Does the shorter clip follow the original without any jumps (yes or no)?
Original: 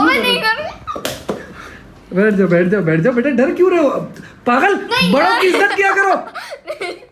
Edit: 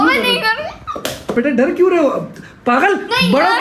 no